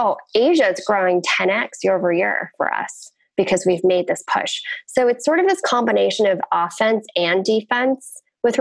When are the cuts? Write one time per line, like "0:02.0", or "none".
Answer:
none